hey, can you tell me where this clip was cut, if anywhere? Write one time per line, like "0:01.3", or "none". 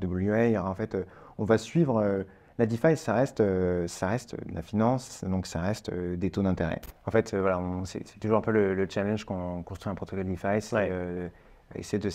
0:06.9